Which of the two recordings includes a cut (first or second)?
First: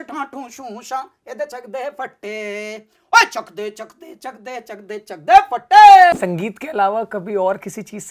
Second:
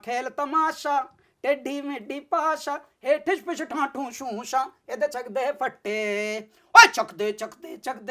first